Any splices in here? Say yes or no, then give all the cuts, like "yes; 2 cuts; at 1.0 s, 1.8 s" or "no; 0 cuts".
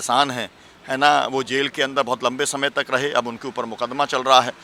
no; 0 cuts